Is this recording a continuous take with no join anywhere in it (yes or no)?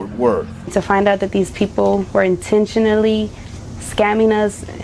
no